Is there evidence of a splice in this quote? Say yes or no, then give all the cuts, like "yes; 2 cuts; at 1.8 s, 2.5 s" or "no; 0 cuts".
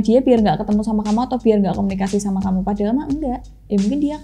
no; 0 cuts